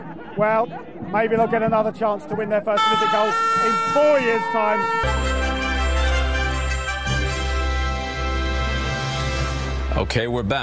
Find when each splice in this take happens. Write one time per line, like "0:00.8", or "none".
0:02.6